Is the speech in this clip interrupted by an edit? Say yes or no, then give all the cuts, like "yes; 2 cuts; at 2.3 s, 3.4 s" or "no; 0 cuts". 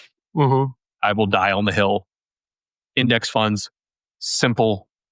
yes; 1 cut; at 1.0 s